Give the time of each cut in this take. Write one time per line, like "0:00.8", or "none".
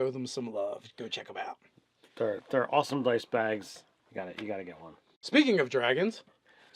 0:01.0